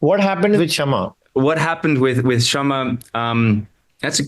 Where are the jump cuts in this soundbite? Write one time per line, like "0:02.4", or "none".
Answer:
0:01.2